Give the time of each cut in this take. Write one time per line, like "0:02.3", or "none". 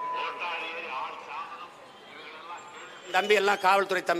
0:03.1